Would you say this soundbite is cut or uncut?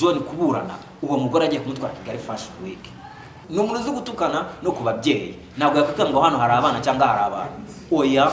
cut